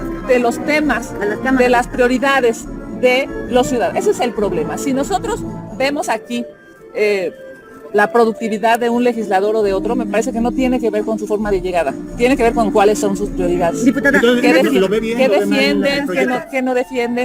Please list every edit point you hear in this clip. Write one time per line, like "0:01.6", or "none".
none

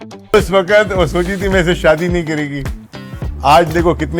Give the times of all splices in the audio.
none

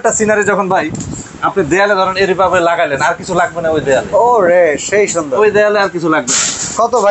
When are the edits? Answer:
none

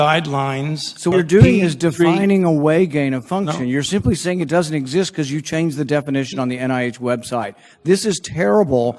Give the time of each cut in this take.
0:01.1

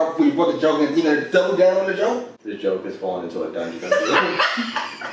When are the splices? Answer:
0:02.4

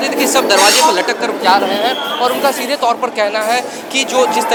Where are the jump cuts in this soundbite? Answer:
none

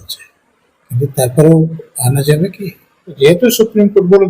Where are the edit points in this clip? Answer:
0:03.2

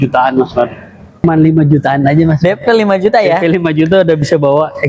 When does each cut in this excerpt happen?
0:01.2

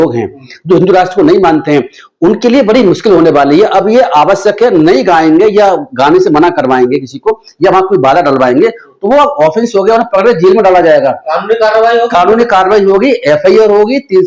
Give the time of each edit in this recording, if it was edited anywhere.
none

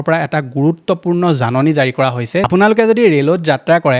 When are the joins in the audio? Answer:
0:02.5

